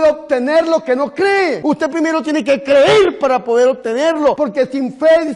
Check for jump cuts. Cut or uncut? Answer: cut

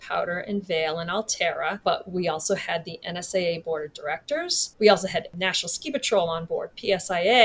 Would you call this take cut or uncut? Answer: cut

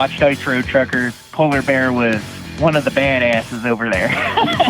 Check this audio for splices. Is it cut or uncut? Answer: cut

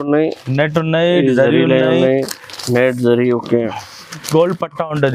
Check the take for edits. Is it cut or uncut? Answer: uncut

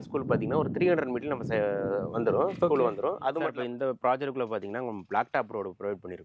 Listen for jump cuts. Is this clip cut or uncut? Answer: cut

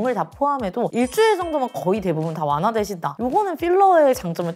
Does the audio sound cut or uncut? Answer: uncut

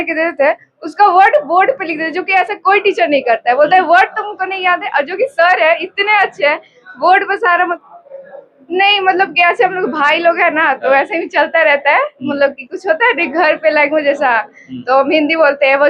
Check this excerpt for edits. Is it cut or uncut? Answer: cut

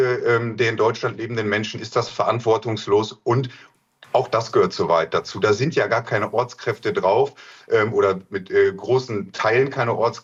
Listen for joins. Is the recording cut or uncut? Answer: uncut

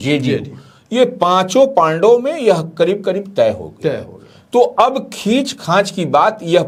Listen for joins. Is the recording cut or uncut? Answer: uncut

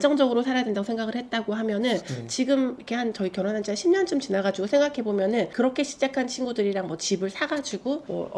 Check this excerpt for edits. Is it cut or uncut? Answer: uncut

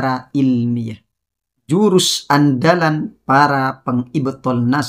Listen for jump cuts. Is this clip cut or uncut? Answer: cut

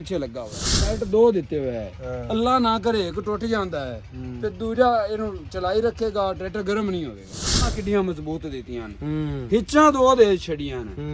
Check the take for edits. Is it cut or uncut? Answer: cut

